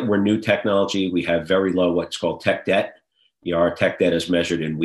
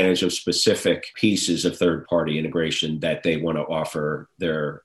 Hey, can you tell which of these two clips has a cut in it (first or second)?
second